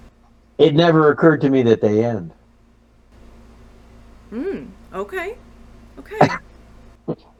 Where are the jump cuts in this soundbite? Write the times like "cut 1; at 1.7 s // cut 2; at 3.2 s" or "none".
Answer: none